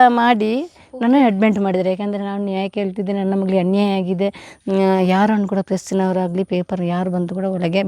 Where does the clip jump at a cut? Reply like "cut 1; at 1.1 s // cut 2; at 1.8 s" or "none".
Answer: cut 1; at 4.5 s